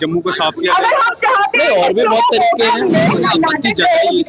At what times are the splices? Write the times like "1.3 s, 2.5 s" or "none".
3.2 s